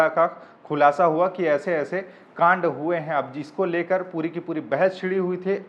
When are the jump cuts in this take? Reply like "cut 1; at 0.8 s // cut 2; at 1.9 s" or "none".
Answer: none